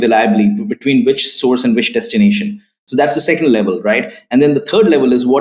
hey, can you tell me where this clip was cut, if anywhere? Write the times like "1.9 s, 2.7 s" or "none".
none